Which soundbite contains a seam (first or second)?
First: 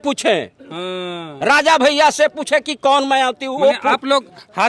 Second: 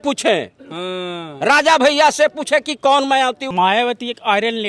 second